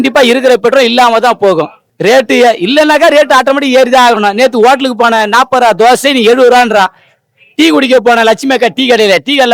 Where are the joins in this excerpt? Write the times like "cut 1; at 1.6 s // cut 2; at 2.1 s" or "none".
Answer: none